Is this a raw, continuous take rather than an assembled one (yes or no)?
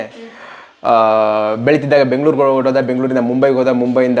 yes